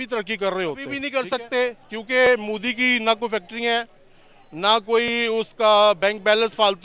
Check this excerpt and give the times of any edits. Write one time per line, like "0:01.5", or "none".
0:01.0